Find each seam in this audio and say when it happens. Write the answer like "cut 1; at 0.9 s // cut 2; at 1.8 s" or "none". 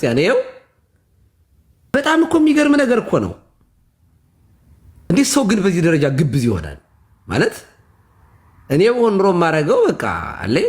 cut 1; at 1.9 s // cut 2; at 5.1 s